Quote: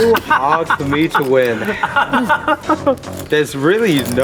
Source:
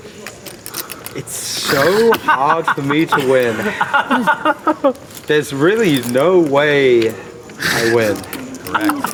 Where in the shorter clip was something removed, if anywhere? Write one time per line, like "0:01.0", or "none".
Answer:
none